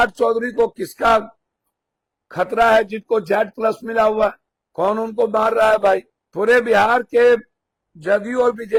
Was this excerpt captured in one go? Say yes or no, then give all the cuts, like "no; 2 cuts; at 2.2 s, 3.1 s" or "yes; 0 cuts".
yes; 0 cuts